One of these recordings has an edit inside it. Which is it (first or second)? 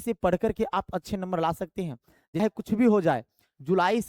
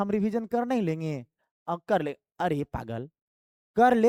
first